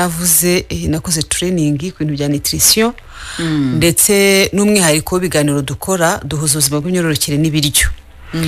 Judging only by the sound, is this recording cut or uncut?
uncut